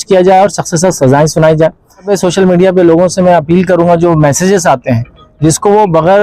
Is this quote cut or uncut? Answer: cut